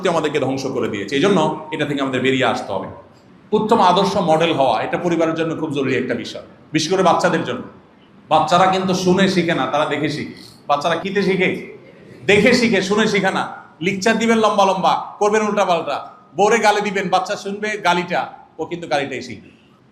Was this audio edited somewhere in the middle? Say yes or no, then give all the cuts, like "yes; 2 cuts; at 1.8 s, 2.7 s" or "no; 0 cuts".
yes; 1 cut; at 11.0 s